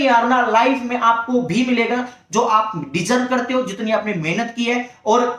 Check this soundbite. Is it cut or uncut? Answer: uncut